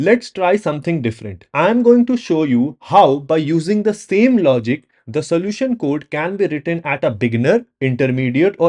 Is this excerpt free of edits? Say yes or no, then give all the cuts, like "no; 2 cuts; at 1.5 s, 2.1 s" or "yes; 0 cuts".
yes; 0 cuts